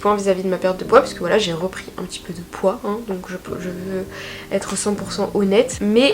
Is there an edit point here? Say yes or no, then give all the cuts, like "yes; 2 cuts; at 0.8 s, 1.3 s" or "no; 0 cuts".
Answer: no; 0 cuts